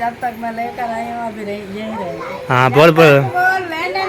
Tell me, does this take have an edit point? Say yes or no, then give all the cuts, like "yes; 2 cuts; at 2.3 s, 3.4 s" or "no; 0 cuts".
no; 0 cuts